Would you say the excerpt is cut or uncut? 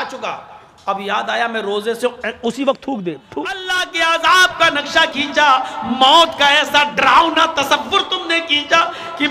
cut